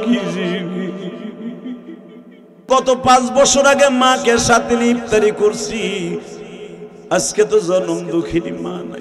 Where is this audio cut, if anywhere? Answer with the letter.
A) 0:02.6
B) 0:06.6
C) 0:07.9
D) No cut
A